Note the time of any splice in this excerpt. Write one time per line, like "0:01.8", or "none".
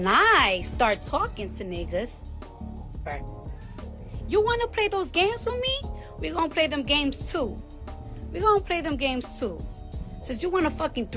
none